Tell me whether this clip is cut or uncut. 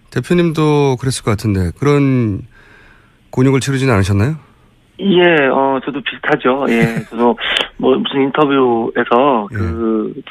cut